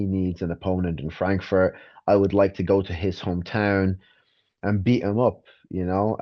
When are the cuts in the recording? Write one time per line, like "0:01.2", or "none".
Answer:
none